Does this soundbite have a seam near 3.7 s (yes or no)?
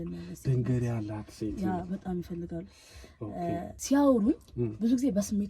yes